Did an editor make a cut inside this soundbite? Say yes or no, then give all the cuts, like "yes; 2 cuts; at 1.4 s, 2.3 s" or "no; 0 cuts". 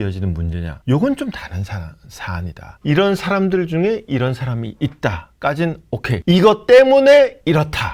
no; 0 cuts